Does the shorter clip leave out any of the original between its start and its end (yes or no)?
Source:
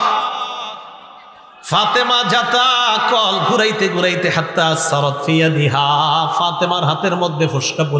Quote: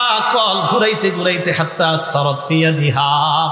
no